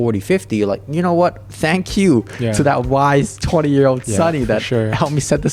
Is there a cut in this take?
no; 0 cuts

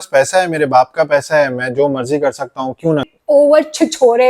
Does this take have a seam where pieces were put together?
yes; 1 cut; at 3.3 s

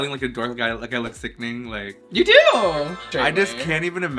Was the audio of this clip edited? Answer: yes; 2 cuts; at 2.0 s, 3.1 s

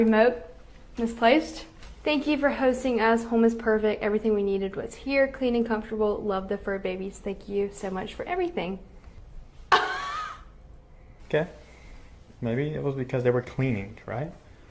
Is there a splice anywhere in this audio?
yes; 2 cuts; at 1.7 s, 11.5 s

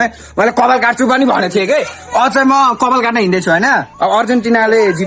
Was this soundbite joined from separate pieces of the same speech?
no; 0 cuts

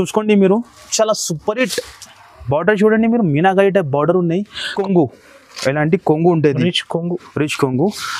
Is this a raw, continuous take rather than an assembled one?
no; 1 cut; at 4.7 s

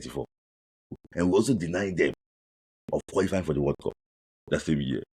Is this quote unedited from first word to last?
no; 1 cut; at 0.9 s

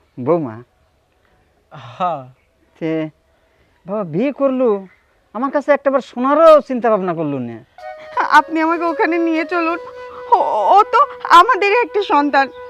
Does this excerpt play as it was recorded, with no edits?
no; 1 cut; at 7.9 s

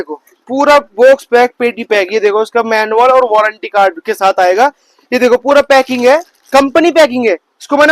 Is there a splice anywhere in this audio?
no; 0 cuts

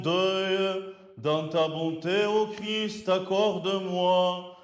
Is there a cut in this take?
no; 0 cuts

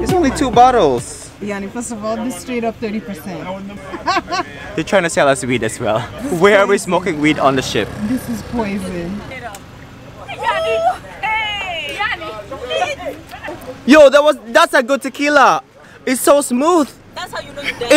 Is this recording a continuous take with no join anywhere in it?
no; 3 cuts; at 3.8 s, 6.1 s, 9.4 s

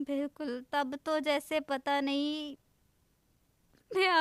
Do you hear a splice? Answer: no; 0 cuts

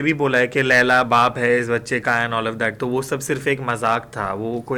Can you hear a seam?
no; 0 cuts

